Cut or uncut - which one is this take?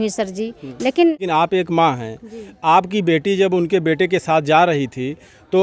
cut